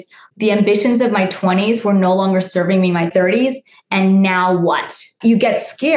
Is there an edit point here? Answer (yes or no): yes